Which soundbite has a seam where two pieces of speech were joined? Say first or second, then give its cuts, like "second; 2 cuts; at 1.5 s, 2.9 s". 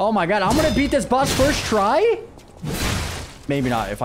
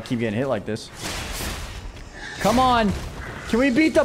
second; 1 cut; at 1.0 s